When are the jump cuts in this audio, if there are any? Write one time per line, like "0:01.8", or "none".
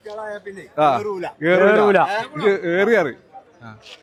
none